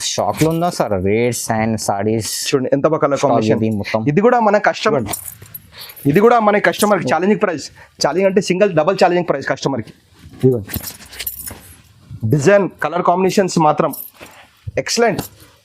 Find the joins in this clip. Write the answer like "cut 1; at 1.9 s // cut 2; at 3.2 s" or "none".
cut 1; at 4.9 s